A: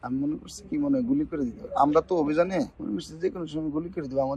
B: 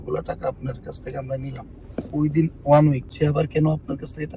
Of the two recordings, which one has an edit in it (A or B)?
B